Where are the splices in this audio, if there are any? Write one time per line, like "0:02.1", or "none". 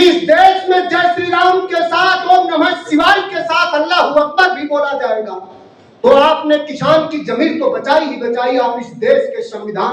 none